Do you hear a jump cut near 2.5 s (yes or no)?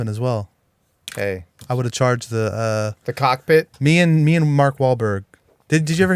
no